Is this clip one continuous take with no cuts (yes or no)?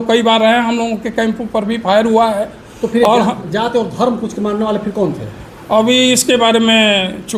yes